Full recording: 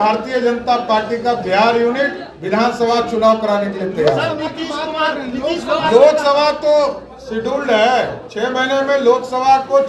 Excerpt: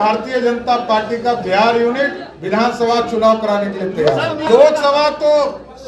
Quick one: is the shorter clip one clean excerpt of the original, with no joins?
no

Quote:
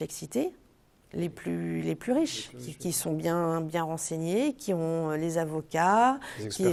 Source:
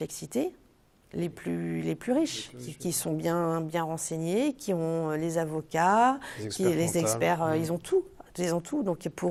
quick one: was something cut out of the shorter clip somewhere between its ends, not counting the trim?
no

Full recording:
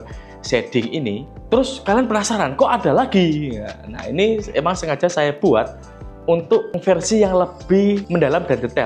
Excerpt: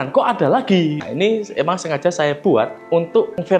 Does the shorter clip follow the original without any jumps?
no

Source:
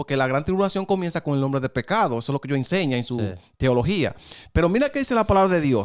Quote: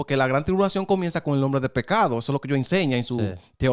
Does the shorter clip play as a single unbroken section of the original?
yes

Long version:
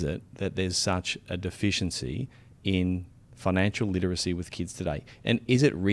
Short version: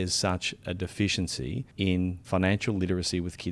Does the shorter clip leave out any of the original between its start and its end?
yes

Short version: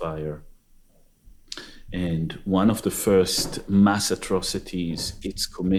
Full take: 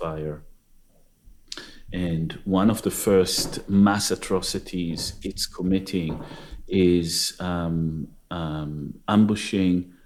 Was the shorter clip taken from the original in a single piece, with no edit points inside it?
yes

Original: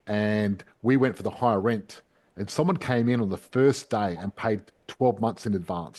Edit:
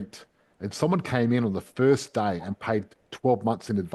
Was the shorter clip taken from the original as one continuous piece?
yes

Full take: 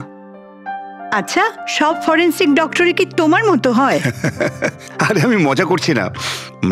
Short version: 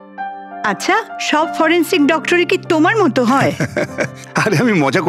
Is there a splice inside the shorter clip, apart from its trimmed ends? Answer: yes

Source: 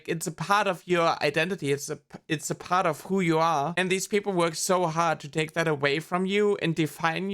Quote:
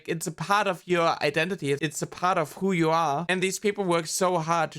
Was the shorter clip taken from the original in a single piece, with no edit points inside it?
no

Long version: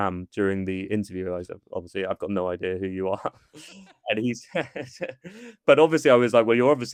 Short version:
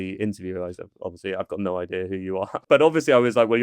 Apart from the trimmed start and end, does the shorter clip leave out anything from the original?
yes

